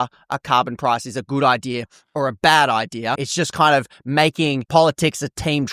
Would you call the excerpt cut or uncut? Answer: cut